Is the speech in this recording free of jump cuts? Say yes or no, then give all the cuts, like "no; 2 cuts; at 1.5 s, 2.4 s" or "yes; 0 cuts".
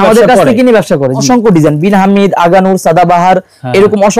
no; 1 cut; at 1.2 s